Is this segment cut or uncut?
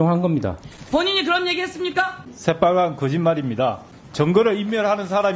cut